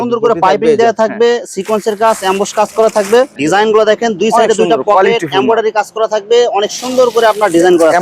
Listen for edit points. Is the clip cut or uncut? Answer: uncut